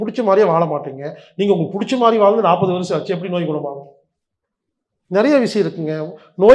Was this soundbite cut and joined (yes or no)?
no